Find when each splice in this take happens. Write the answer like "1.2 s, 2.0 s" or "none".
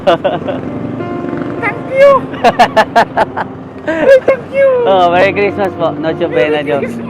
none